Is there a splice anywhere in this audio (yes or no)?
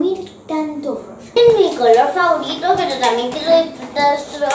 yes